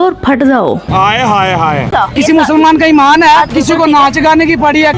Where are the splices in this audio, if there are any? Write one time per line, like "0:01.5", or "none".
0:01.9